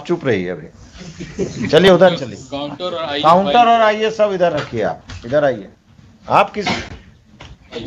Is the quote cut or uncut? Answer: uncut